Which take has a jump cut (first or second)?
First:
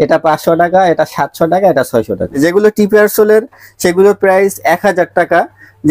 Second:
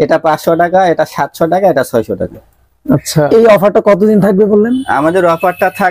first